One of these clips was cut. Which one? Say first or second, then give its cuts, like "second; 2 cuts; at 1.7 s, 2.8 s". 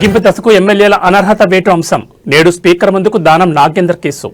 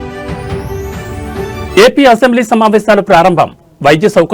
second; 1 cut; at 1.0 s